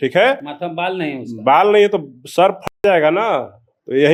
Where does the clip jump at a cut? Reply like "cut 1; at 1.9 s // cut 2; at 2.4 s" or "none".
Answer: none